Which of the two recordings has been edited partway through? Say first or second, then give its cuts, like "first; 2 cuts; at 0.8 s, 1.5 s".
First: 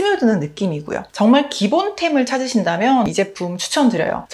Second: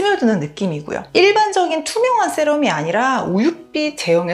second; 1 cut; at 1.0 s